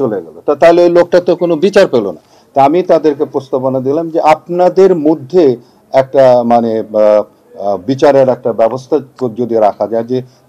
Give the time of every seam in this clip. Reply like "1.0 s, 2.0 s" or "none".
none